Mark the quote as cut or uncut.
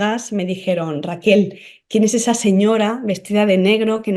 uncut